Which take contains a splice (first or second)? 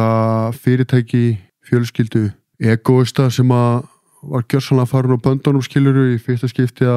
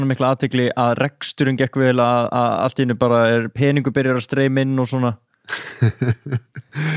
first